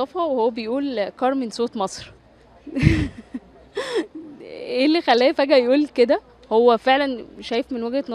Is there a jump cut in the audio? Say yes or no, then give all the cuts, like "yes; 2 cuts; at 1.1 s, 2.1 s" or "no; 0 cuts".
no; 0 cuts